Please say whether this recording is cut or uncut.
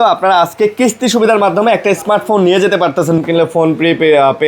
cut